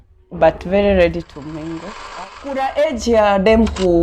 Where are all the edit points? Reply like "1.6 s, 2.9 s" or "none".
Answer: 2.1 s